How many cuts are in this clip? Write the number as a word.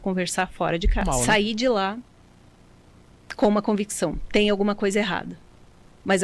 one